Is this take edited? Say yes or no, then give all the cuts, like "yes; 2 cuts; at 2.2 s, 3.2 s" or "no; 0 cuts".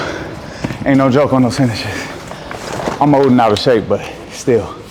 no; 0 cuts